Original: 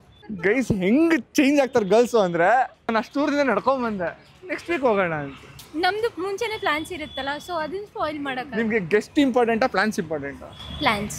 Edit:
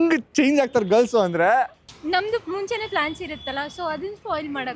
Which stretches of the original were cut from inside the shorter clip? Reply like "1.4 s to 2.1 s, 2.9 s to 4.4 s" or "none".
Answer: 2.8 s to 5.5 s

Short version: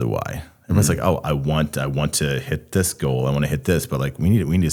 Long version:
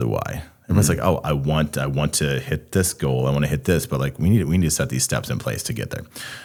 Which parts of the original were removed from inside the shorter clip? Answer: none

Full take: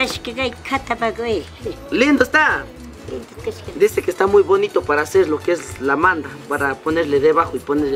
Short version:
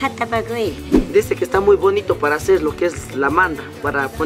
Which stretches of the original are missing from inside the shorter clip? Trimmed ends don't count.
1.7 s to 3.6 s

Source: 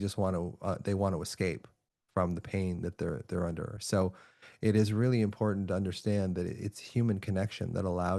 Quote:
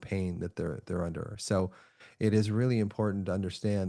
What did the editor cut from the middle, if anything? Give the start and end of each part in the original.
none

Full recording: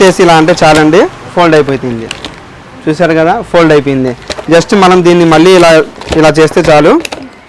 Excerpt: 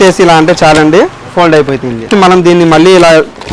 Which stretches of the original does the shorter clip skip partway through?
2.1 s to 4.7 s

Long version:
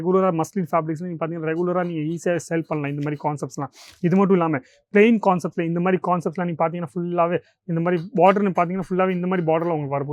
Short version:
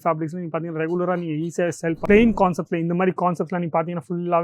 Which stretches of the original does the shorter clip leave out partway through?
2.7 s to 4.8 s

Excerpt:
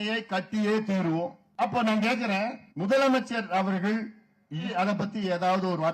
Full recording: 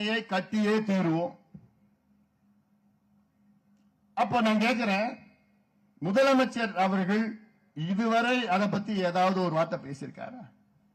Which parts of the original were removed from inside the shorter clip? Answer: 1.4 s to 4.0 s, 5.2 s to 5.9 s, 7.9 s to 8.4 s

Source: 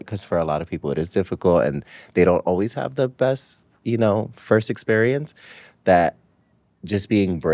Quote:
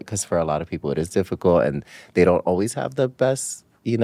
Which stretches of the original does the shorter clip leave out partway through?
none

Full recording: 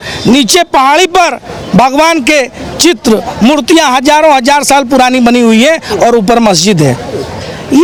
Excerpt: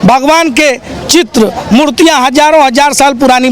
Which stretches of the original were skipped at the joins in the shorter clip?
none

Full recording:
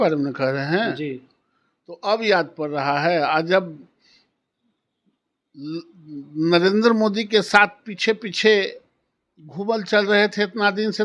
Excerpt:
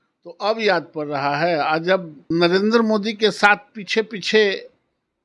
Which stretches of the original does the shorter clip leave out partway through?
3.8 s to 6.3 s

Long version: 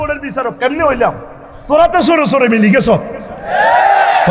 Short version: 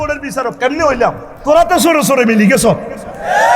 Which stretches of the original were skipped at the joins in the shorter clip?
1.3 s to 1.5 s

